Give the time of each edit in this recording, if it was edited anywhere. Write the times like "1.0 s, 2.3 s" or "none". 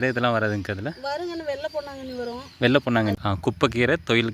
3.2 s

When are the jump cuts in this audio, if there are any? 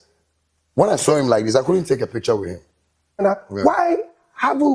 3.2 s

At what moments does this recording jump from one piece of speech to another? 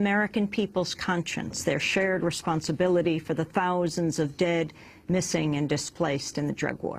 none

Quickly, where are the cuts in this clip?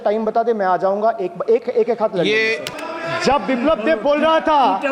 2.7 s

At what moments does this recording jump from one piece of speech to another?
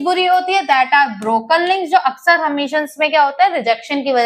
none

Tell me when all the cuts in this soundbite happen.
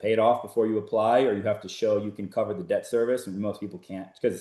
none

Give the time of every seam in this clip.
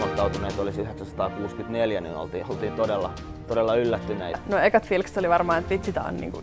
4.4 s

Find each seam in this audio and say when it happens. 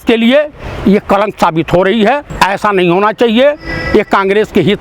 2.3 s

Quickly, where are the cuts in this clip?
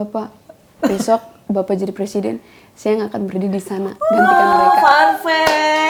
none

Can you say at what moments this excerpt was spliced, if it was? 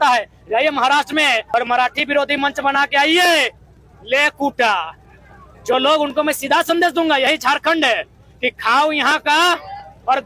1.5 s

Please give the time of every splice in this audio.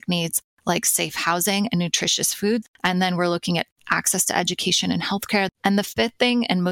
2.6 s, 5.5 s

